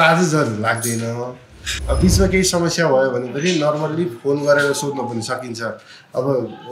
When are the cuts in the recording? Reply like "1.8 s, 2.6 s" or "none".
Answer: 1.7 s